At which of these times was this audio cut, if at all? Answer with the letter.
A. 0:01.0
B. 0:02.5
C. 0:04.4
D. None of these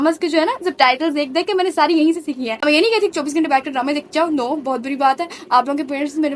B